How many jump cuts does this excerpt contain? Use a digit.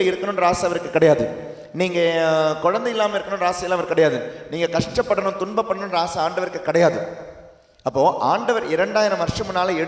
0